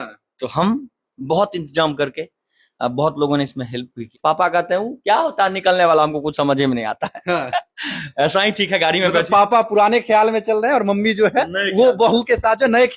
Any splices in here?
yes; 1 cut; at 4.0 s

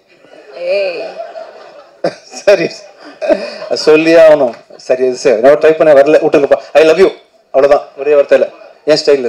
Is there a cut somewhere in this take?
no; 0 cuts

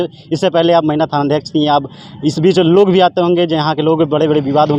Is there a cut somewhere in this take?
no; 0 cuts

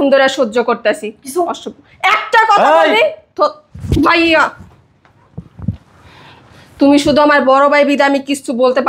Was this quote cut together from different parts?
no; 0 cuts

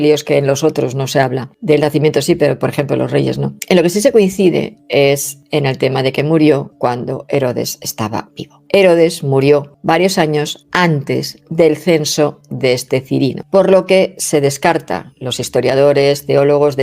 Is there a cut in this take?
no; 0 cuts

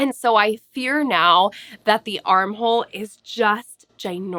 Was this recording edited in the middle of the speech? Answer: no; 0 cuts

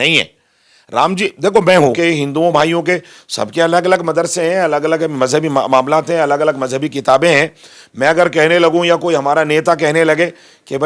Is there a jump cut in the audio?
yes; 1 cut; at 2.0 s

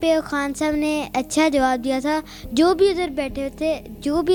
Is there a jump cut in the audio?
no; 0 cuts

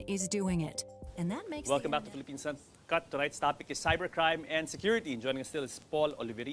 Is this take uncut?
no; 1 cut; at 1.2 s

